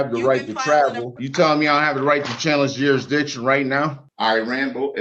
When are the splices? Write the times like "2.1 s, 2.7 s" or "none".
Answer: 1.2 s, 4.1 s